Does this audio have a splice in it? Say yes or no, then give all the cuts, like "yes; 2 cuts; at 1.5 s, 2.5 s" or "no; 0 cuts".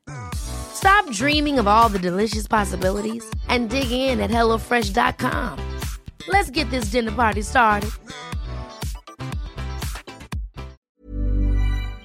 yes; 1 cut; at 10.8 s